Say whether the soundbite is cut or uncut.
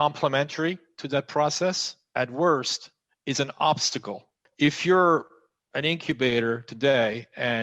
cut